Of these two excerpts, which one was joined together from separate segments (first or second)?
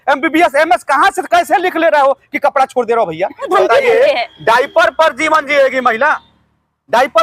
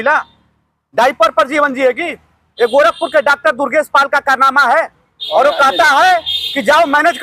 first